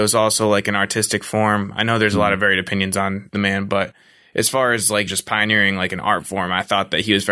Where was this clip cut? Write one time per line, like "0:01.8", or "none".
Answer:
0:05.1